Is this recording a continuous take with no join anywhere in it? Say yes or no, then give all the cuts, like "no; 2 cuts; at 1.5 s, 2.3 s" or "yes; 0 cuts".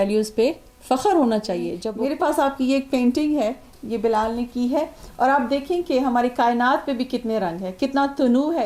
no; 1 cut; at 1.8 s